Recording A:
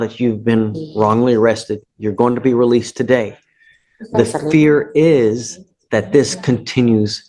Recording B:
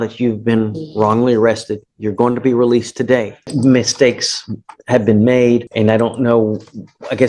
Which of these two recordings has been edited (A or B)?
B